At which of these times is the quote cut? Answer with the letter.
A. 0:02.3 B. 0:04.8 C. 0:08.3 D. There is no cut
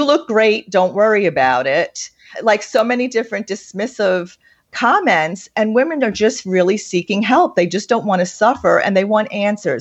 A